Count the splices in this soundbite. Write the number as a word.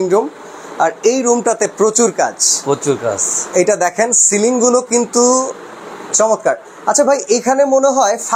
zero